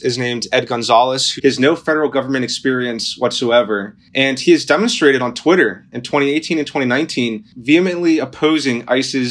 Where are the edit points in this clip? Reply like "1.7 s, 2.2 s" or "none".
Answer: 1.3 s, 4.0 s, 7.5 s